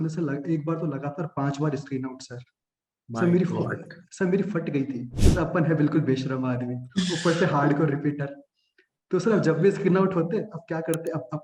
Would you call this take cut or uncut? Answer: cut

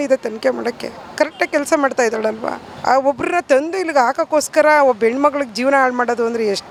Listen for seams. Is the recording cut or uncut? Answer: uncut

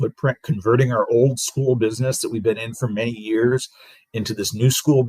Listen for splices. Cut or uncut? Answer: uncut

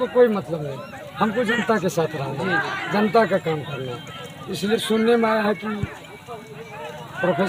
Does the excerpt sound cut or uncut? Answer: uncut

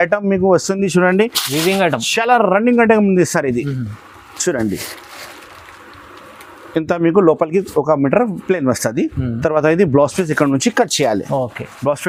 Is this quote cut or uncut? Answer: uncut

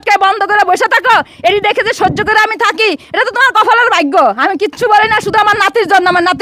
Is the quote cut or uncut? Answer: uncut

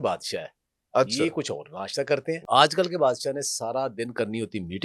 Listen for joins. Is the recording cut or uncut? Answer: cut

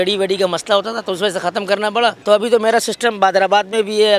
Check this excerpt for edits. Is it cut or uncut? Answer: cut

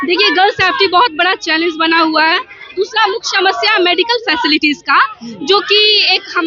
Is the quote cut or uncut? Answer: uncut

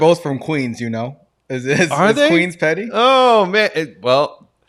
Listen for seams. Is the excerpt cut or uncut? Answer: uncut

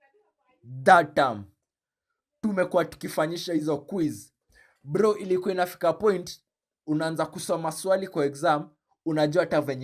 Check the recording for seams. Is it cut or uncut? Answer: uncut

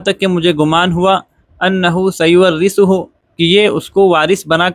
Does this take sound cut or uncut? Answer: cut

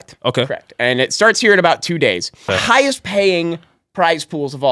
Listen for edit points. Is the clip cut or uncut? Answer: cut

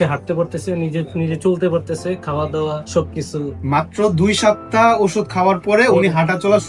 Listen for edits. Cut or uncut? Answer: uncut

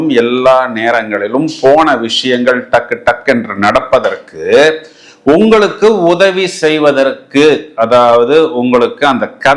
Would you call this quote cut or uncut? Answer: uncut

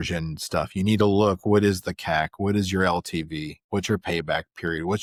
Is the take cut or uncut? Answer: uncut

